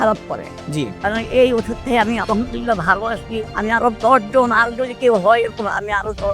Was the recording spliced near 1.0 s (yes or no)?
yes